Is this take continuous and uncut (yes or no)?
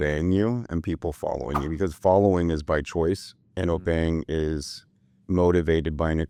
yes